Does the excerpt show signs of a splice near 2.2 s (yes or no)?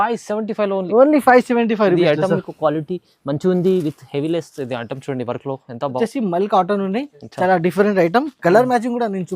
no